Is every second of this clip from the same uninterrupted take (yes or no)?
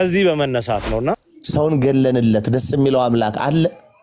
no